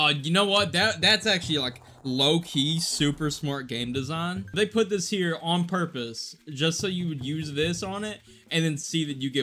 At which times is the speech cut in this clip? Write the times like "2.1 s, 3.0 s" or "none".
4.5 s